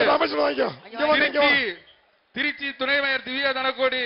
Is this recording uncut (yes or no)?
yes